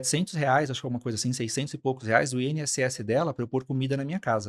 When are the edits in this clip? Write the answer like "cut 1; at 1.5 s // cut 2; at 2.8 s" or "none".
none